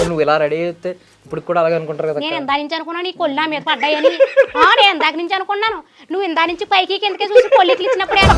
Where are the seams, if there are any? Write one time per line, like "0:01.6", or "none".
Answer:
none